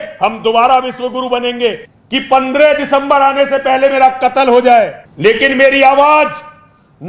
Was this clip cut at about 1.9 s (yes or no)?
yes